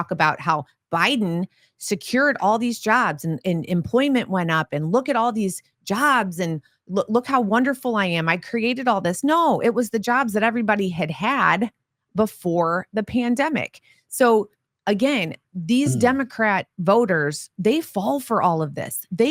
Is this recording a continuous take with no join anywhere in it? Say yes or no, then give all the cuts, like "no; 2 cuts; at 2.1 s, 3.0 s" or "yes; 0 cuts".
yes; 0 cuts